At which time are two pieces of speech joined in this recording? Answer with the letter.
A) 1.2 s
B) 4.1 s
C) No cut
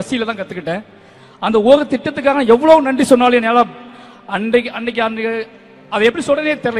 A